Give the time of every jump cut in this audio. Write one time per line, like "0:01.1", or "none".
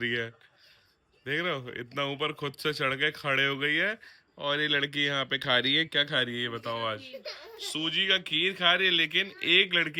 none